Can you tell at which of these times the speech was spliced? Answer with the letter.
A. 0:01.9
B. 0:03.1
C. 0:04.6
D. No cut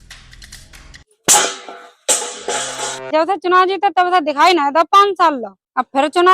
B